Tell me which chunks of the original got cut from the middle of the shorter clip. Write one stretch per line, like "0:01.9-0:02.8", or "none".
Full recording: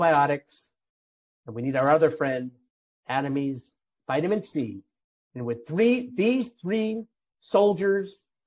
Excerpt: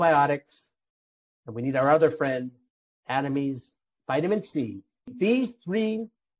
0:05.1-0:06.1